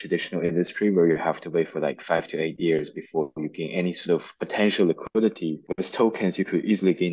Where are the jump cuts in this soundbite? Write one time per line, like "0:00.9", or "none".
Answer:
0:04.4
0:05.6

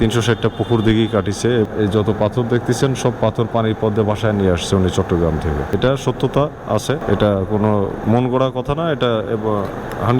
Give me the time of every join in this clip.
none

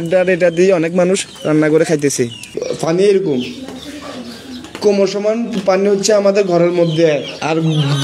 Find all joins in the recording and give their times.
0:02.6

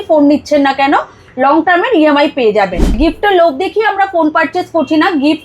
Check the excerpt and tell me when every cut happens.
0:02.9

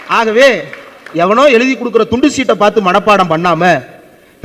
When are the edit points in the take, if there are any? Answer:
0:01.0

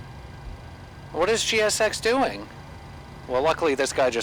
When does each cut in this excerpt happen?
0:00.8
0:03.2

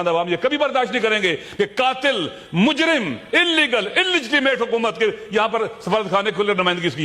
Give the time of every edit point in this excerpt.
none

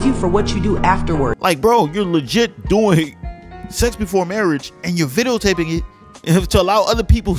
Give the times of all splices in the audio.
0:01.4

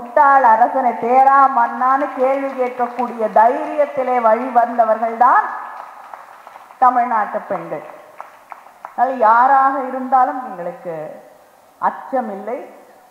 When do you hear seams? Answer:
none

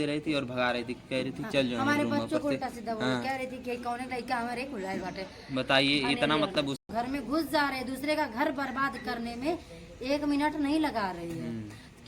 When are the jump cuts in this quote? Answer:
0:06.8

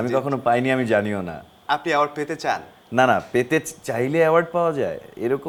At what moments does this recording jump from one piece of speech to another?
none

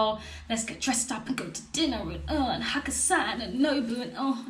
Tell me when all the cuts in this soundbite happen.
none

